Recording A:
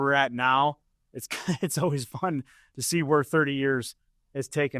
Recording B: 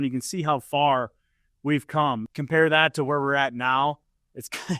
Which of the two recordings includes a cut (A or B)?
B